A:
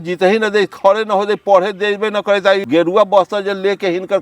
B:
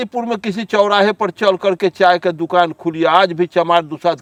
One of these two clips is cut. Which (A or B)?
A